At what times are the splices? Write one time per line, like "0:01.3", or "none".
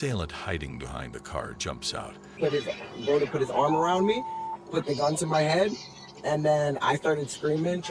0:02.3